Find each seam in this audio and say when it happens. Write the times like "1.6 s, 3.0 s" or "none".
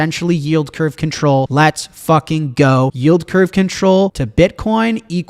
1.5 s, 3.0 s, 4.2 s